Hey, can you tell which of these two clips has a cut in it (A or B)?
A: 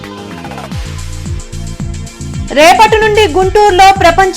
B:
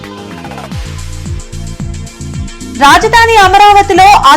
B